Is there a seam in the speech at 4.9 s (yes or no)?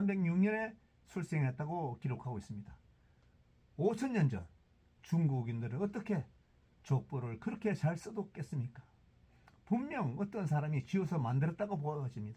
no